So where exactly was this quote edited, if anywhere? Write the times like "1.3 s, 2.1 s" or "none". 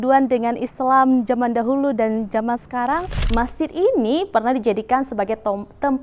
3.2 s